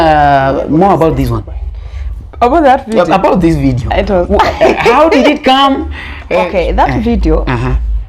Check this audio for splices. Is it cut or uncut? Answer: cut